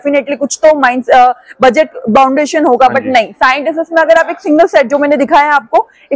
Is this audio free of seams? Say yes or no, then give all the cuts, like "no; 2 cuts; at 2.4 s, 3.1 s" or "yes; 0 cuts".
yes; 0 cuts